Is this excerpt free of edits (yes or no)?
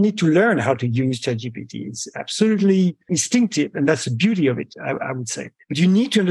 no